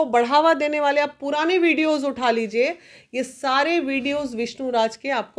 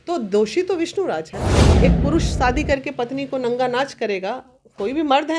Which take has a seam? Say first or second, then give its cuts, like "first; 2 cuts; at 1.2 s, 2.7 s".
second; 1 cut; at 1.7 s